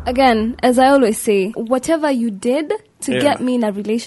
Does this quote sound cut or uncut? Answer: cut